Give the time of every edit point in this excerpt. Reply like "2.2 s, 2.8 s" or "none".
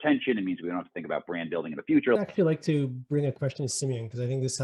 2.2 s